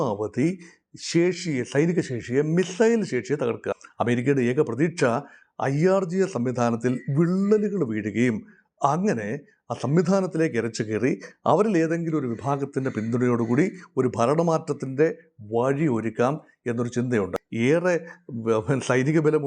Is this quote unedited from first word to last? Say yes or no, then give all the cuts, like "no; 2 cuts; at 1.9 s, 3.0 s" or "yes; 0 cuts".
no; 2 cuts; at 3.7 s, 17.3 s